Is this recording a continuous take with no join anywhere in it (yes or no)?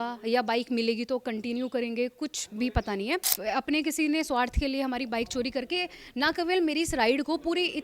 no